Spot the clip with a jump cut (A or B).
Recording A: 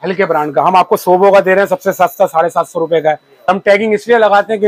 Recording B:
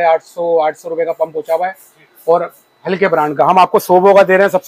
A